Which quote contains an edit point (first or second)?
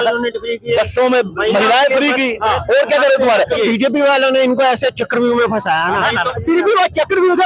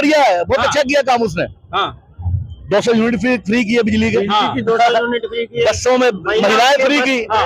first